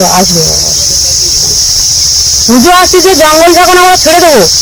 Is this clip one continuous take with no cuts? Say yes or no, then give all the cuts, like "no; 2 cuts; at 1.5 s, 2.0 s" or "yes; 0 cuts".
yes; 0 cuts